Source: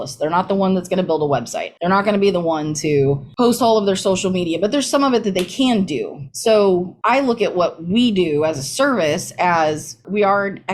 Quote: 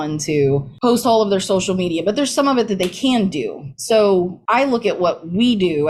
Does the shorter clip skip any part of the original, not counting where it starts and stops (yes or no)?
no